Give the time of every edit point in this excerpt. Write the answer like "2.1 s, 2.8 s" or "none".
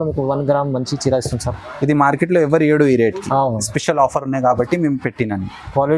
none